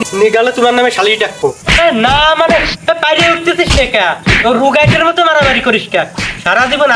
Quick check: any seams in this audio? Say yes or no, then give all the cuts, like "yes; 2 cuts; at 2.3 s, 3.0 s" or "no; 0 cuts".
yes; 1 cut; at 1.6 s